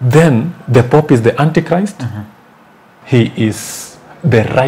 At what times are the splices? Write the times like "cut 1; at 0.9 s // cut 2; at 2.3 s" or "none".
cut 1; at 2.9 s

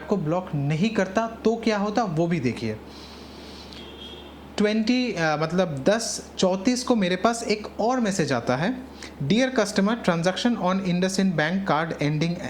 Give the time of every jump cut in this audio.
none

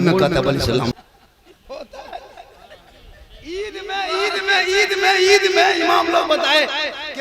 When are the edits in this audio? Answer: cut 1; at 0.9 s

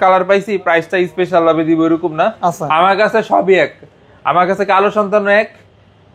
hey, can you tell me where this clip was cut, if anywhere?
none

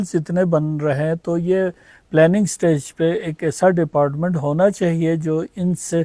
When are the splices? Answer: none

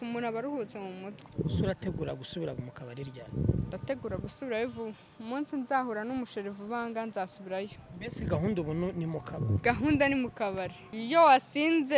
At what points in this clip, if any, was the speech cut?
cut 1; at 1.2 s // cut 2; at 10.9 s

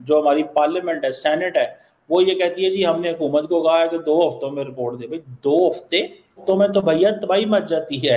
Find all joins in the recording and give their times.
cut 1; at 6.4 s

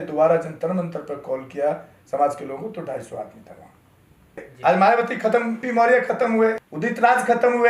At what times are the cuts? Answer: cut 1; at 4.5 s // cut 2; at 5.6 s // cut 3; at 6.7 s

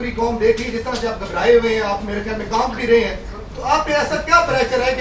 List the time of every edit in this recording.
none

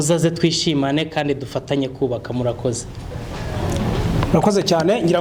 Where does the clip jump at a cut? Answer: none

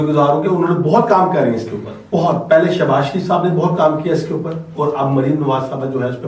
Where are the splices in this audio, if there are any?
cut 1; at 2.0 s

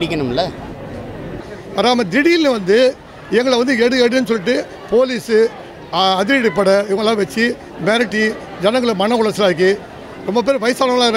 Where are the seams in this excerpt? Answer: cut 1; at 1.6 s

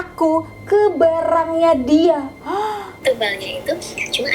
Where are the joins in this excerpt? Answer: cut 1; at 2.9 s

